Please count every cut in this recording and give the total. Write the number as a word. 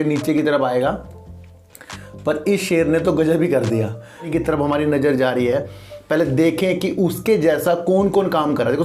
one